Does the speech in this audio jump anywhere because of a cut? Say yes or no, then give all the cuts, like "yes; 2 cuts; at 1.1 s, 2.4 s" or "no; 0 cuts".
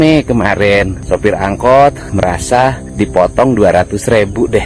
yes; 2 cuts; at 1.0 s, 2.4 s